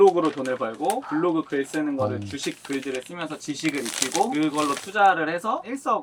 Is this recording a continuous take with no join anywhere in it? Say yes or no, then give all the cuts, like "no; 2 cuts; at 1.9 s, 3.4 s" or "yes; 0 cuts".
yes; 0 cuts